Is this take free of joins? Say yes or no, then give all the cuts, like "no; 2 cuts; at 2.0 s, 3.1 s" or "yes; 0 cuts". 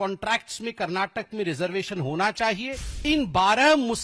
no; 1 cut; at 3.0 s